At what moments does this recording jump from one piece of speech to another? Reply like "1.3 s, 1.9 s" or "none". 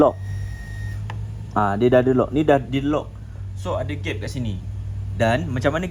none